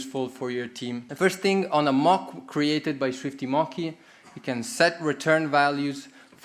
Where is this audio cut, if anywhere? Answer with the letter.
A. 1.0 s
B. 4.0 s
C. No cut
A